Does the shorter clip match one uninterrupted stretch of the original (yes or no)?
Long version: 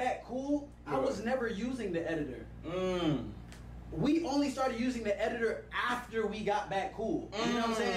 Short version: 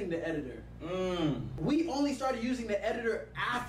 no